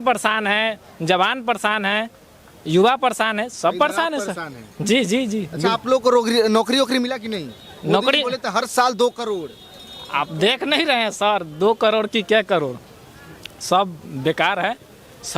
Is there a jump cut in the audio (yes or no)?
no